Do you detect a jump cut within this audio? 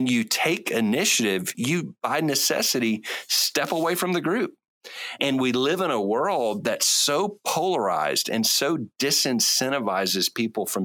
yes; 2 cuts; at 1.6 s, 5.2 s

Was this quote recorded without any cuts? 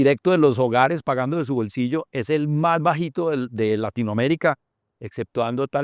yes; 0 cuts

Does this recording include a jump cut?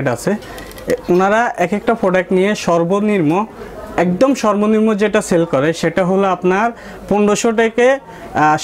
no; 0 cuts

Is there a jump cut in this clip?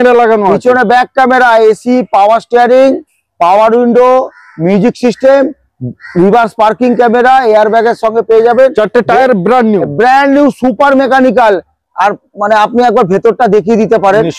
no; 0 cuts

